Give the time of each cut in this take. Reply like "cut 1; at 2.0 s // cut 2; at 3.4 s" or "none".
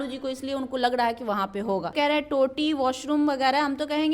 cut 1; at 1.9 s